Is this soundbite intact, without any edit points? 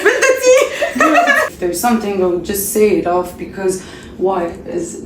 no; 1 cut; at 1.5 s

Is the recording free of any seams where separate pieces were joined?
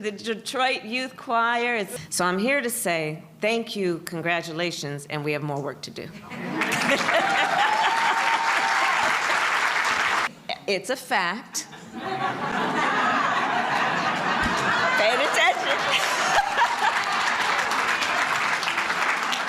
no; 2 cuts; at 1.9 s, 10.3 s

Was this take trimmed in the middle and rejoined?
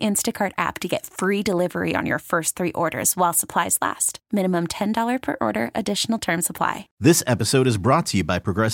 yes; 1 cut; at 6.9 s

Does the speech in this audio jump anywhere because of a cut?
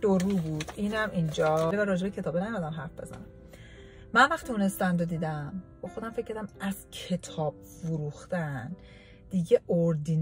yes; 1 cut; at 1.7 s

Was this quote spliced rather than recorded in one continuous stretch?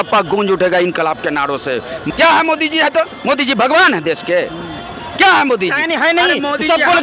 yes; 1 cut; at 2.0 s

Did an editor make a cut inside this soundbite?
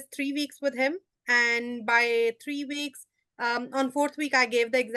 no; 0 cuts

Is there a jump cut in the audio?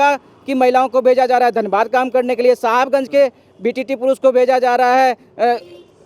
no; 0 cuts

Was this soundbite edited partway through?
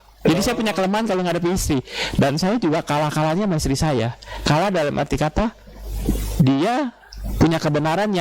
no; 0 cuts

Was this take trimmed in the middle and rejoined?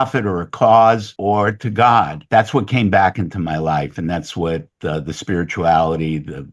yes; 2 cuts; at 1.1 s, 2.2 s

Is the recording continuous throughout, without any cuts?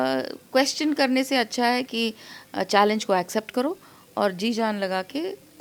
yes; 0 cuts

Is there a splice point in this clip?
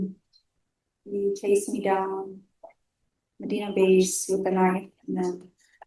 no; 0 cuts

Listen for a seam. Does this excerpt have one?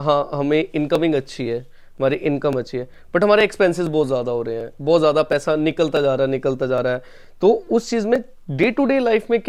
no; 0 cuts

